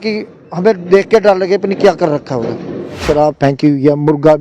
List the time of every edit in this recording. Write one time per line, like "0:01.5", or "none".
0:03.0